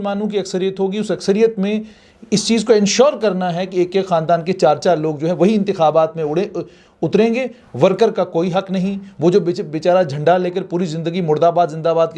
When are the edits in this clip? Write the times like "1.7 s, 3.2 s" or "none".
none